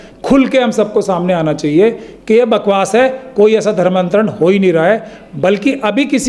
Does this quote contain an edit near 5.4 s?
no; 0 cuts

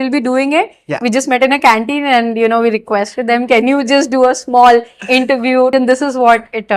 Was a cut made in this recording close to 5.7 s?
yes; 1 cut; at 5.7 s

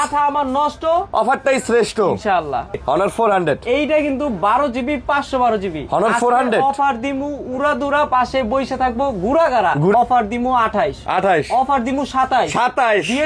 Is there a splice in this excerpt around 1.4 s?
no; 2 cuts; at 2.8 s, 9.9 s

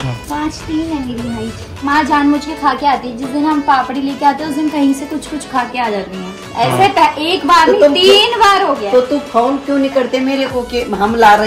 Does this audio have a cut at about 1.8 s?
yes; 1 cut; at 1.8 s

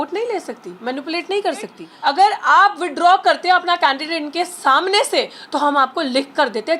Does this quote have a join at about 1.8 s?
yes; 1 cut; at 1.8 s

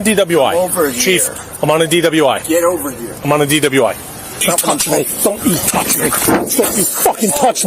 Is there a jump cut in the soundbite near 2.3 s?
no; 1 cut; at 4.4 s

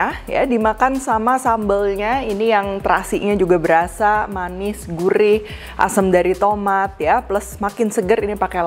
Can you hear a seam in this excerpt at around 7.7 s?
no; 0 cuts

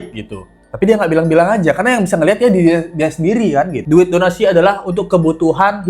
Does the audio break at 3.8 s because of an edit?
yes; 1 cut; at 3.8 s

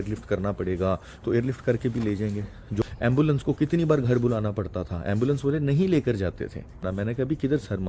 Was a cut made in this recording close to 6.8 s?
yes; 2 cuts; at 2.8 s, 6.8 s

